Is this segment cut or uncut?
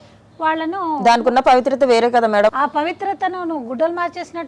cut